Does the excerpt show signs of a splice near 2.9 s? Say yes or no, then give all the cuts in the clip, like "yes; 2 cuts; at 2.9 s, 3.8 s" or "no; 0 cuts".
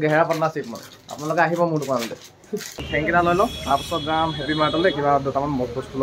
yes; 1 cut; at 2.9 s